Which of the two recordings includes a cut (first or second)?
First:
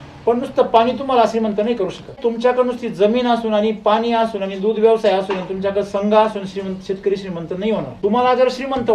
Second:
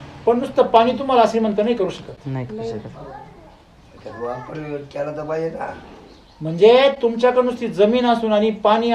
first